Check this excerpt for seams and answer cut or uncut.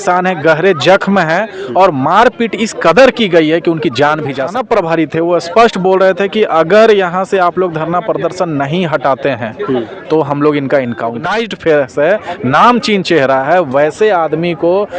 cut